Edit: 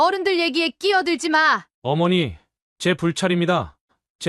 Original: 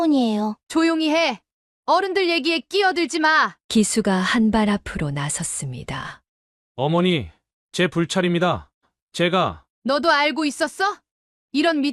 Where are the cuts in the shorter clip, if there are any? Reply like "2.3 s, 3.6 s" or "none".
1.7 s